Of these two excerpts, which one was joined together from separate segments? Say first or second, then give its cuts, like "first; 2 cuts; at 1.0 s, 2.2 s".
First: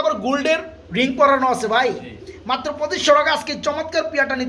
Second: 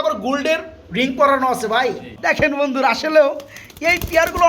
second; 1 cut; at 2.4 s